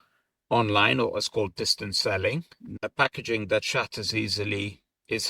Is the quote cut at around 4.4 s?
no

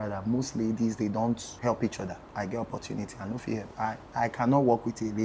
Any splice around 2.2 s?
yes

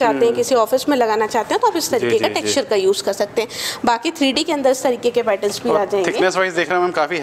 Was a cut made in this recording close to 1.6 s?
no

